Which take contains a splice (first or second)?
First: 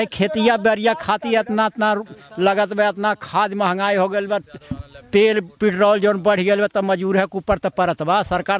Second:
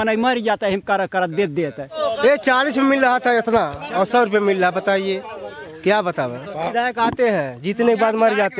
second